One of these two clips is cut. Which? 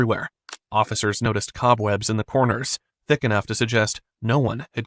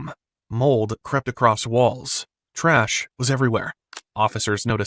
second; 1 cut; at 1.0 s

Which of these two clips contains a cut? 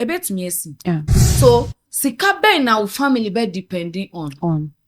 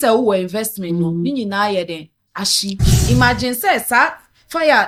first; 1 cut; at 1.2 s

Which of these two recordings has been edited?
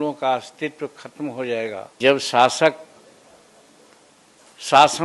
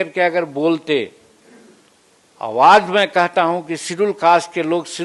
first; 1 cut; at 2.0 s

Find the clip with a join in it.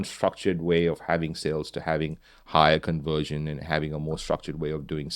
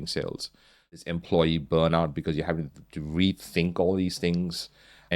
second; 1 cut; at 1.1 s

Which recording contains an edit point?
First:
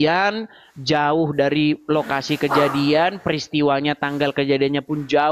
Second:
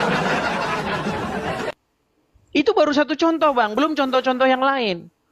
second; 1 cut; at 1.0 s

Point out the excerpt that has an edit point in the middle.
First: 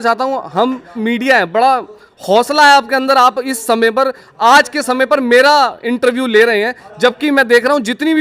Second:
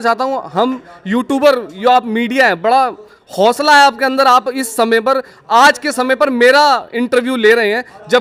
first; 1 cut; at 1.0 s

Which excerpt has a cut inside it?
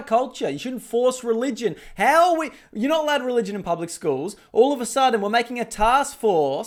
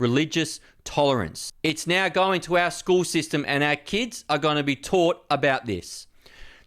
second; 1 cut; at 1.4 s

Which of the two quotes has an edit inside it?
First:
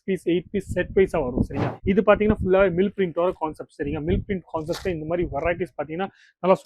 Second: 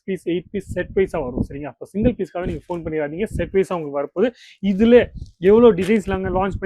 first; 1 cut; at 1.7 s

